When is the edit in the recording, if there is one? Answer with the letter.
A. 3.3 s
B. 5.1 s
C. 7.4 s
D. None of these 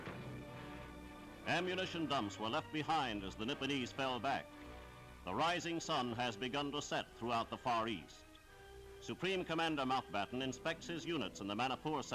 A